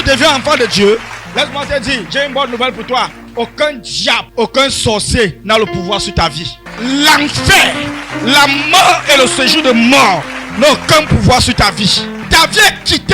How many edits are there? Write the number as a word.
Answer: five